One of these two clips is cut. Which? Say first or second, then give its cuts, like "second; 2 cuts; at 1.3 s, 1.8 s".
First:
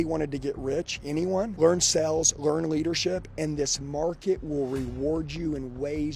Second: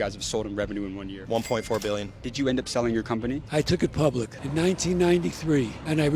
second; 2 cuts; at 1.1 s, 2.2 s